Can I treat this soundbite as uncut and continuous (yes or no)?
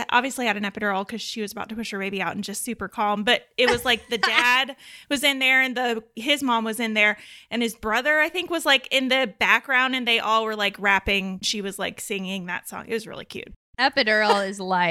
no